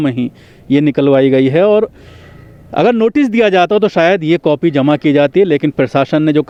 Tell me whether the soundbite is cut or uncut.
uncut